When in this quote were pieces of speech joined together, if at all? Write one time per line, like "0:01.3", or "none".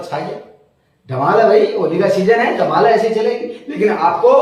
none